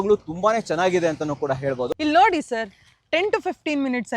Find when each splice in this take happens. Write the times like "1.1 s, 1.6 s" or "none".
1.9 s